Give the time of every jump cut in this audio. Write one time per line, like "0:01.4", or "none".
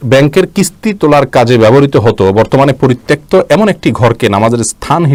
none